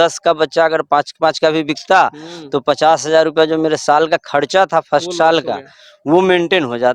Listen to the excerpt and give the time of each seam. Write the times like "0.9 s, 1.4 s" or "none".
none